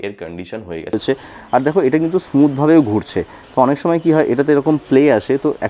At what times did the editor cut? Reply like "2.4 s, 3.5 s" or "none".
0.9 s